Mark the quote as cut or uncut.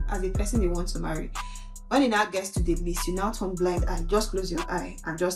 uncut